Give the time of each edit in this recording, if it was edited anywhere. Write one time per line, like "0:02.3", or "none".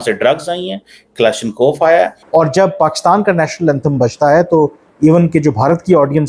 0:02.2